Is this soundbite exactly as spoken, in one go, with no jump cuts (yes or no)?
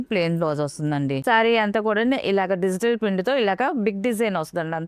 no